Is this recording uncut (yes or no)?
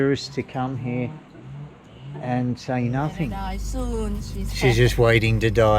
no